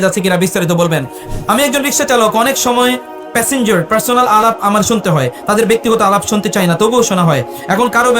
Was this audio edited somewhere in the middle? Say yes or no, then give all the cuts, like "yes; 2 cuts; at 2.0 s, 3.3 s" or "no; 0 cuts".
yes; 1 cut; at 1.2 s